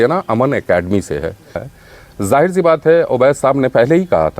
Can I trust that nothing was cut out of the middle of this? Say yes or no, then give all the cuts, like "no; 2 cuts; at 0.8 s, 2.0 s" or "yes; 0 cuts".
no; 1 cut; at 1.7 s